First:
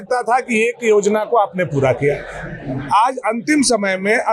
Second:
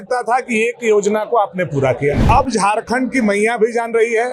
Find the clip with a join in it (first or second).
second